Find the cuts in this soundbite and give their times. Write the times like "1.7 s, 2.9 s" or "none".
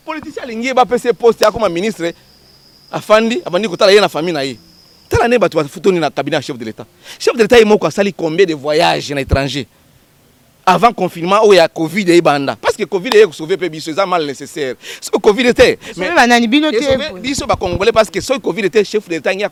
none